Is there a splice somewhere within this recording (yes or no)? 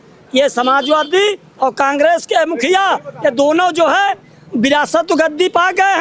no